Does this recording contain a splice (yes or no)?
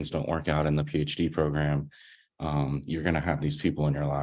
no